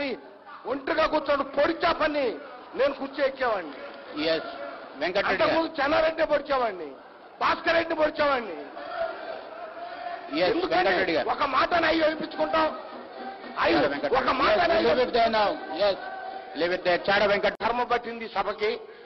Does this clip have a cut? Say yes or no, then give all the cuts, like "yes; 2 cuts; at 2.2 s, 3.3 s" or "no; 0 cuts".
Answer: yes; 1 cut; at 17.5 s